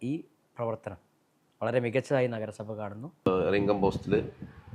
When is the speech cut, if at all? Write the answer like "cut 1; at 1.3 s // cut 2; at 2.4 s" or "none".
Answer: cut 1; at 3.3 s